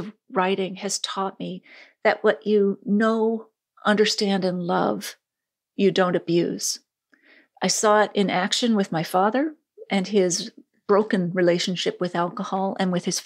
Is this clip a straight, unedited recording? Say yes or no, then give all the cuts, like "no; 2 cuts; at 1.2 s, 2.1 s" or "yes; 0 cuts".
yes; 0 cuts